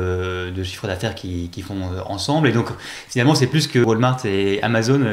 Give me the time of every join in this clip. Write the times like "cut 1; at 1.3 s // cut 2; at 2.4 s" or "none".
cut 1; at 3.8 s